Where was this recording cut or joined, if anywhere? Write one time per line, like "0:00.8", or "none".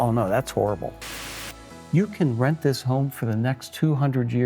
0:01.3